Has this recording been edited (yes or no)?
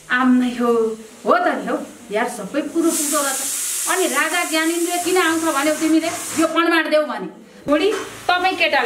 yes